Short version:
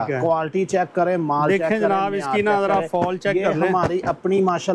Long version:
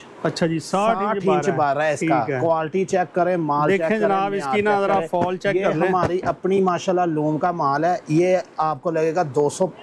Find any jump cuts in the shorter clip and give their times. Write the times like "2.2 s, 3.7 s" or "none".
none